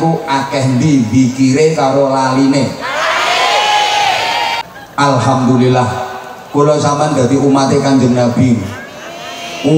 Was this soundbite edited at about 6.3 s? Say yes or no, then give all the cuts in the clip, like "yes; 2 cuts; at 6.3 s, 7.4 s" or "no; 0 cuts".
no; 1 cut; at 4.6 s